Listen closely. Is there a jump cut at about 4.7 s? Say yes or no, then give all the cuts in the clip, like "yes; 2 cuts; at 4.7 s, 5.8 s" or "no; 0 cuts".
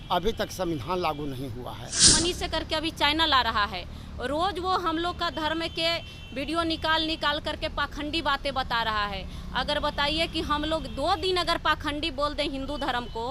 no; 1 cut; at 2.1 s